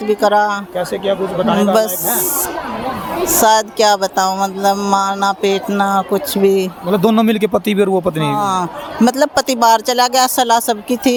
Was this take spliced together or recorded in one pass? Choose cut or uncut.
uncut